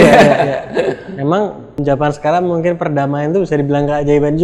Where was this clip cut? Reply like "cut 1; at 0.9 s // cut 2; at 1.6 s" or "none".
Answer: cut 1; at 1.8 s